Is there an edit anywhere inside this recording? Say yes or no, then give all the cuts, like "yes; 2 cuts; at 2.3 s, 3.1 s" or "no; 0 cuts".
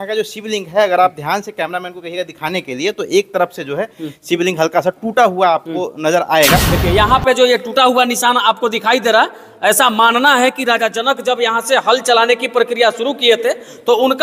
yes; 1 cut; at 6.7 s